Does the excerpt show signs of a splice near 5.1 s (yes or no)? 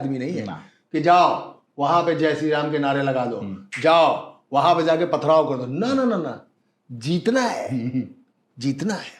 no